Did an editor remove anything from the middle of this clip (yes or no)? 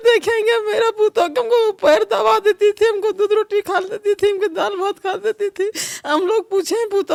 no